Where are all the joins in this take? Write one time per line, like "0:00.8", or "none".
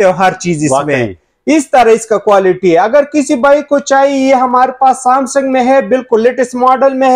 none